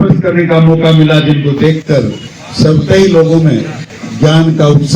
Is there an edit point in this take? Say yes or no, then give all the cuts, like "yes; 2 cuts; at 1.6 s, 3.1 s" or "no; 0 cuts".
no; 0 cuts